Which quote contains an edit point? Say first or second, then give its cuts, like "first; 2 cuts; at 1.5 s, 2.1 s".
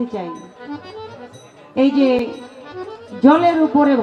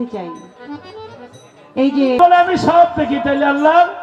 second; 1 cut; at 2.2 s